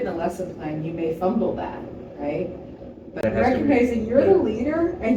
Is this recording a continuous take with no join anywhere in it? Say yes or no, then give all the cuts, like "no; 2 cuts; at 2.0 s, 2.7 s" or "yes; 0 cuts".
no; 1 cut; at 3.1 s